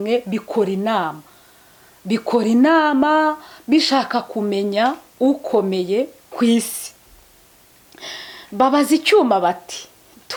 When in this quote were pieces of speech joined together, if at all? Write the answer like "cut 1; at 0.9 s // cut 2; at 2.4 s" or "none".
none